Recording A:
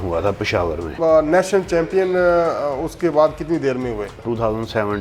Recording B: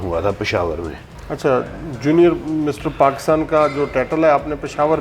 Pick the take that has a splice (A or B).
A